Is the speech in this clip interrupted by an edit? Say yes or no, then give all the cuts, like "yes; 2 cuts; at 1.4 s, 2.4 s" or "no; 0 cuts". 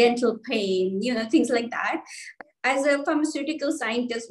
yes; 1 cut; at 2.3 s